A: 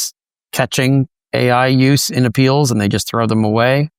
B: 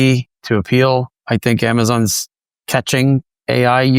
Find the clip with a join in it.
B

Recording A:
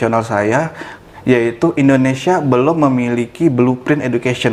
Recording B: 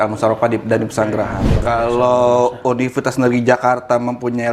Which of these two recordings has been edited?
B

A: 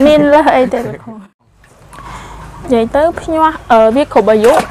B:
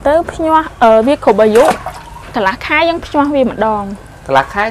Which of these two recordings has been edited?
A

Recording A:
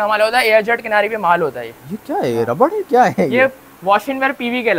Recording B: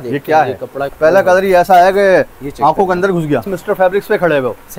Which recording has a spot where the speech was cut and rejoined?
B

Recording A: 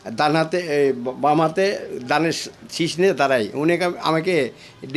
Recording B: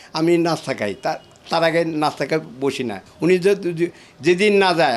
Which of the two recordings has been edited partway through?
B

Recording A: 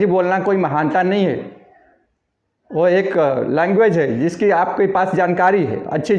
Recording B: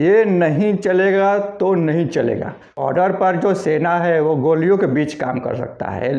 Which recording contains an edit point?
B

